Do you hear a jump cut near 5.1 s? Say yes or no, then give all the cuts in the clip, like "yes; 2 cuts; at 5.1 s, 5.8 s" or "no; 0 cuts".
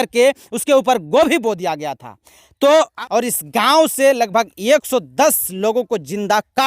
no; 1 cut; at 2.9 s